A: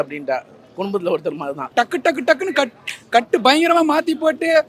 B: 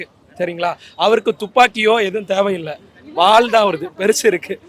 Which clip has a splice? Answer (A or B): A